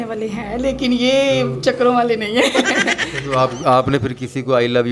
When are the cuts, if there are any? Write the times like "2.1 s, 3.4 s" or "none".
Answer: none